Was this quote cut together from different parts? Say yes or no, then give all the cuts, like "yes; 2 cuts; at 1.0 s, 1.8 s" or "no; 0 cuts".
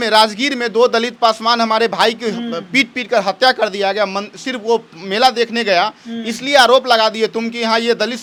no; 0 cuts